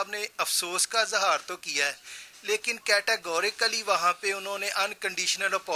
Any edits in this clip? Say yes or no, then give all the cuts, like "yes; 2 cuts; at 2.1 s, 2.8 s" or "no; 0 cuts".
no; 0 cuts